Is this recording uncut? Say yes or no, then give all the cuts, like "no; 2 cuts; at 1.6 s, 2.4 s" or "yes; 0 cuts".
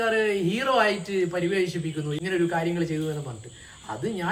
yes; 0 cuts